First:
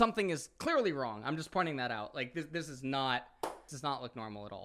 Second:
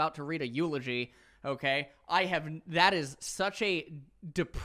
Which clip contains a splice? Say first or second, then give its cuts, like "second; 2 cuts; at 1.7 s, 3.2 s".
first; 1 cut; at 3.7 s